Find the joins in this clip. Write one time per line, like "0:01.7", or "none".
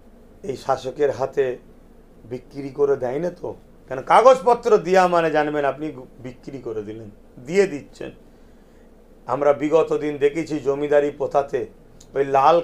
none